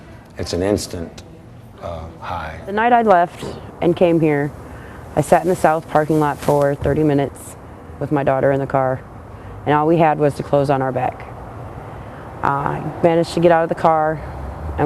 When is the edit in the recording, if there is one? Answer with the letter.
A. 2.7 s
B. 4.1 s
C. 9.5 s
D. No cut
A